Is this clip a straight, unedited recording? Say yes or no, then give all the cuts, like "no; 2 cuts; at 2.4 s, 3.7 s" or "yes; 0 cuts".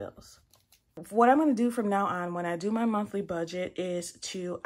no; 1 cut; at 1.0 s